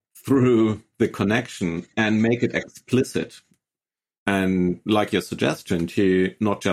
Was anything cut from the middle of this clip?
yes; 1 cut; at 4.1 s

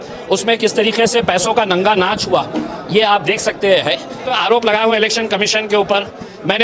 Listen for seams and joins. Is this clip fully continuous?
no; 1 cut; at 4.3 s

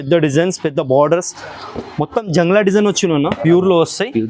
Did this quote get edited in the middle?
yes; 1 cut; at 3.4 s

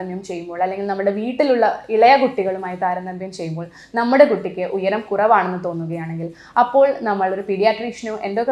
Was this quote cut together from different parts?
no; 0 cuts

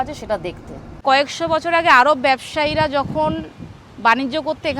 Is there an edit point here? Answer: yes; 1 cut; at 1.0 s

